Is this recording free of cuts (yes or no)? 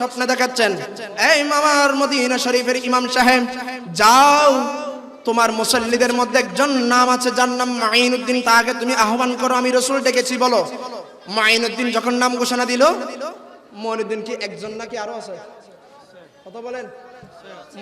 yes